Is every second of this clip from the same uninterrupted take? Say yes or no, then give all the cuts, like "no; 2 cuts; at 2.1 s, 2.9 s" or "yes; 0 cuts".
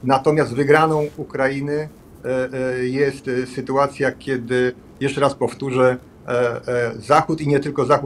yes; 0 cuts